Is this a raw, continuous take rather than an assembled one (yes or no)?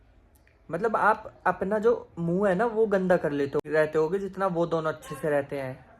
no